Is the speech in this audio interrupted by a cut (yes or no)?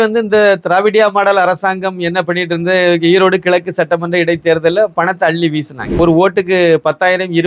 yes